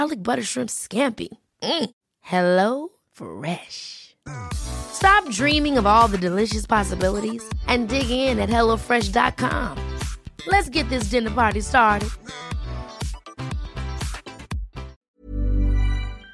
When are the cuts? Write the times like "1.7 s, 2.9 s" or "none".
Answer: 15.1 s